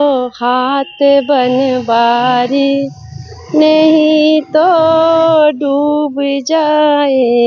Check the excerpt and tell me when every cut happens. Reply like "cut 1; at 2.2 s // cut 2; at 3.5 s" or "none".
none